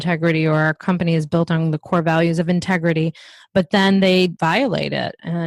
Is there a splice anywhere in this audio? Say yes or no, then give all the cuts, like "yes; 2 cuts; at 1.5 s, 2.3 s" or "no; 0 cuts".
no; 0 cuts